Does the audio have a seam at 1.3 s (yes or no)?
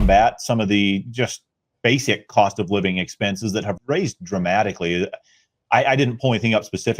no